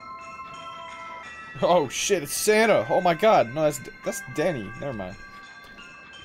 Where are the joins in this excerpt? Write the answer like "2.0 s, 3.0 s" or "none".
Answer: none